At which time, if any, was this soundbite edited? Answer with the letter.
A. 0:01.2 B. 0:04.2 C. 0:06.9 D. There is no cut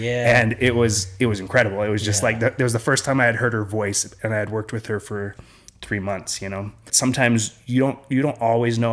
C